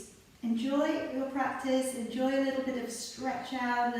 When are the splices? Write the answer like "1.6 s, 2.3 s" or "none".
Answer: none